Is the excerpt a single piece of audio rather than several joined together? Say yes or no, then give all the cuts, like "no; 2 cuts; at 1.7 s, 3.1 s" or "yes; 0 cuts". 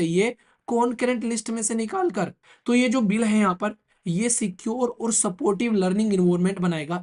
no; 1 cut; at 2.5 s